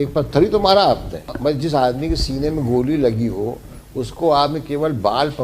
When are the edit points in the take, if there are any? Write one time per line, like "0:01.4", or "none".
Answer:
0:01.2

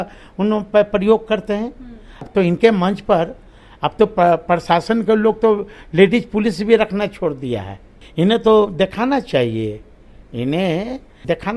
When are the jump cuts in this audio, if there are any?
0:02.2
0:08.0

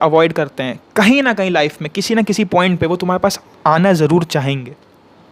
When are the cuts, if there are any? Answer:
none

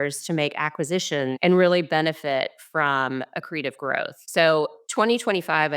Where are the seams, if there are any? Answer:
0:01.4

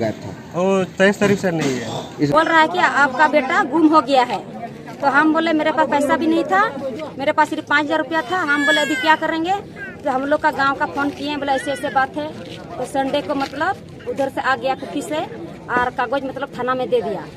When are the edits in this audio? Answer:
0:02.3

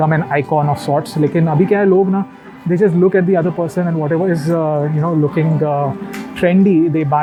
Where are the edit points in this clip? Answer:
none

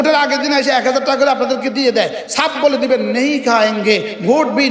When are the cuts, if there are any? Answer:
none

